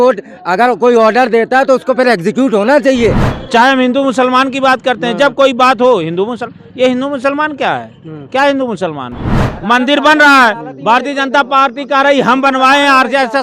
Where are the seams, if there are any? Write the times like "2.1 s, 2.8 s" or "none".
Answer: 3.3 s, 9.4 s